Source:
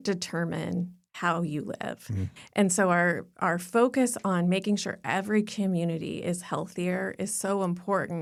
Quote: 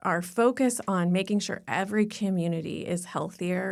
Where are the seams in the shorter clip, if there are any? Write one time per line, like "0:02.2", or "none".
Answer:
none

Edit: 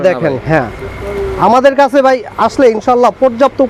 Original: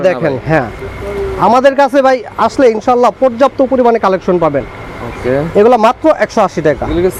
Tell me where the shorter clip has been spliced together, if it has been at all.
none

